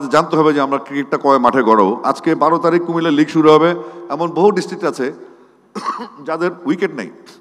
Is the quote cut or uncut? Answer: uncut